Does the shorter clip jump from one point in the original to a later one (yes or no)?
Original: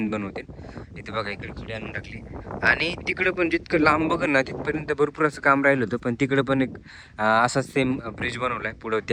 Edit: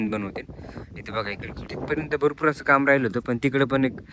yes